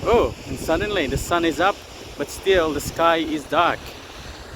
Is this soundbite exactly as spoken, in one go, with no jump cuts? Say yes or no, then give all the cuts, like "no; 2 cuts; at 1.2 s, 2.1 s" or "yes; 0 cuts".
yes; 0 cuts